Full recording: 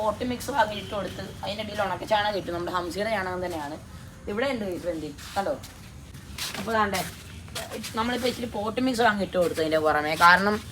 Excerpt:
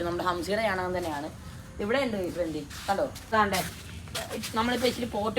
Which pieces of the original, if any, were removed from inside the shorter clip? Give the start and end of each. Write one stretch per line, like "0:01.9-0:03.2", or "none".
0:05.8-0:06.7

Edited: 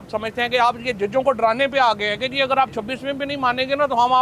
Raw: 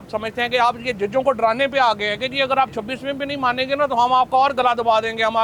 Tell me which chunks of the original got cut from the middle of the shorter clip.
none

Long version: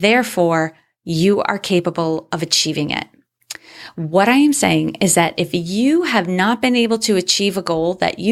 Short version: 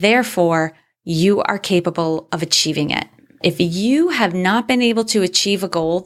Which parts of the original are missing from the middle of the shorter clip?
0:03.4-0:05.3

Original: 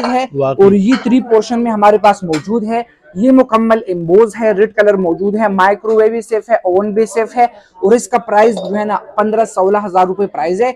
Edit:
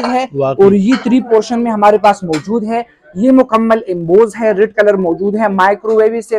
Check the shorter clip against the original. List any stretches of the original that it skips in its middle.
none

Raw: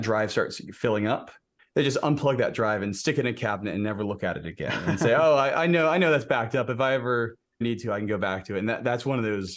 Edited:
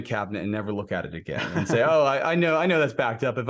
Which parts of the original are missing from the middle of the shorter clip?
none

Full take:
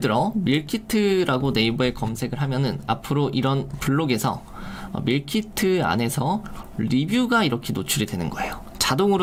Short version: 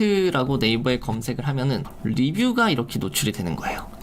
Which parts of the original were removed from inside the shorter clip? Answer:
0:02.8-0:06.6

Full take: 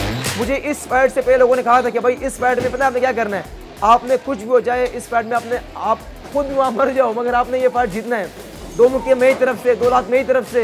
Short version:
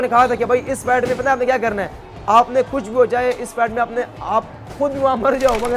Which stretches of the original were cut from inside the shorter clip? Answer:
none

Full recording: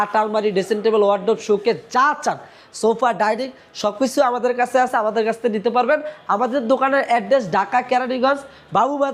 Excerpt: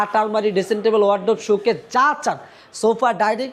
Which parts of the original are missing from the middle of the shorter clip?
none

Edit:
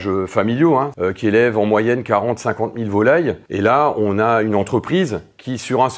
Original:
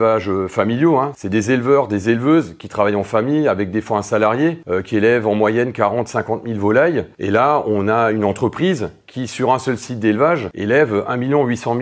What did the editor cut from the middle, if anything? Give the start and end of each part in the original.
0:01.1-0:04.6

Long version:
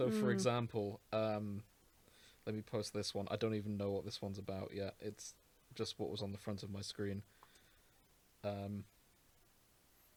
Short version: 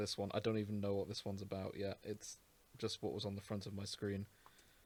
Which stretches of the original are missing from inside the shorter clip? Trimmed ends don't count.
none

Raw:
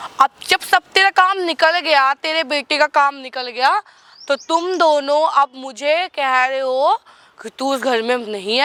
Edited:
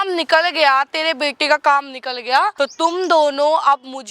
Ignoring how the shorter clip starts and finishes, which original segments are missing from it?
0:03.8-0:04.2

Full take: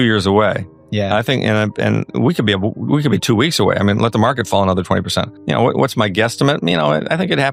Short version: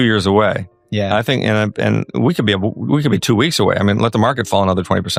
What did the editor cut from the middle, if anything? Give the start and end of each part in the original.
none

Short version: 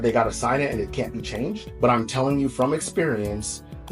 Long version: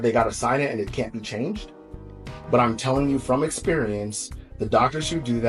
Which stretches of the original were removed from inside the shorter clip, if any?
0:01.7-0:02.4

